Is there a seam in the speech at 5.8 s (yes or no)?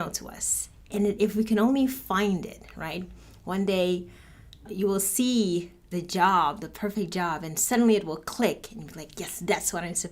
yes